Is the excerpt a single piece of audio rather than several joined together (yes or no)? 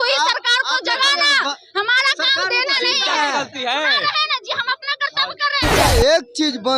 no